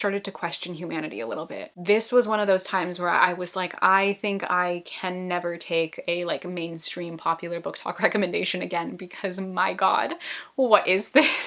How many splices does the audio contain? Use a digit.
0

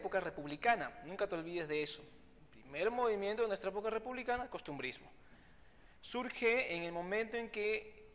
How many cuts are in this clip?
1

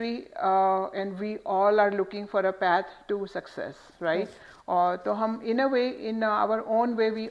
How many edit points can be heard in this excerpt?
0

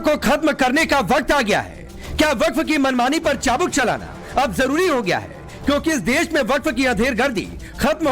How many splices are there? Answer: 1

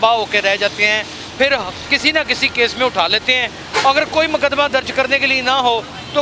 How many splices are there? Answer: 0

